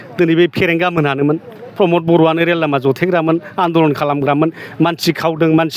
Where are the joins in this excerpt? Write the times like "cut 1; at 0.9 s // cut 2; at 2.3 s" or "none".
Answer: none

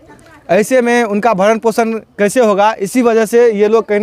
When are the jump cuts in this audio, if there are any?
none

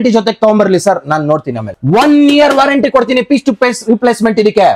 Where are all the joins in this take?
cut 1; at 1.7 s

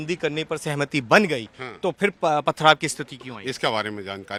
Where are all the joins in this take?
none

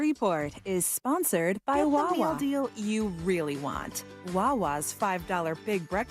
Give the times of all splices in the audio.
cut 1; at 2.3 s

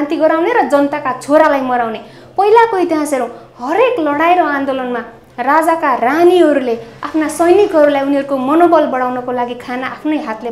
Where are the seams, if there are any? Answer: none

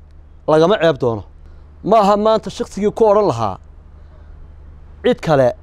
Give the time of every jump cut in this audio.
none

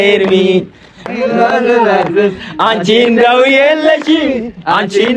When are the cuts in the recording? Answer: cut 1; at 1.1 s

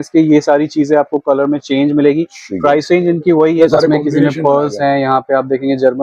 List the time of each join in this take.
cut 1; at 3.6 s

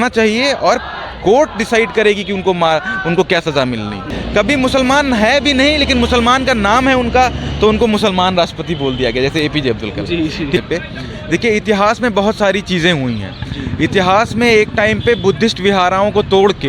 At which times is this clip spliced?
cut 1; at 4.1 s // cut 2; at 10.6 s

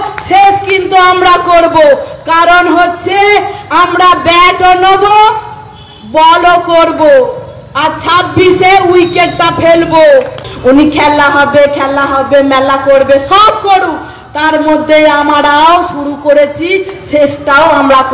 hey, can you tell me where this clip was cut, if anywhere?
cut 1; at 10.5 s

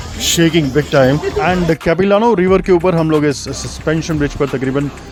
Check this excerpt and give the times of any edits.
none

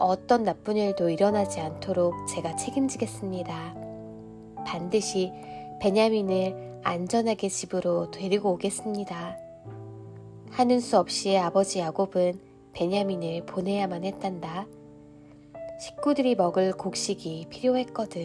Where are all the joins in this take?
cut 1; at 3.6 s // cut 2; at 4.7 s

